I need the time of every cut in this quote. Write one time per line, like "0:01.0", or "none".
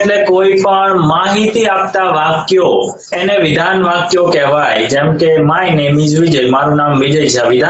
0:03.0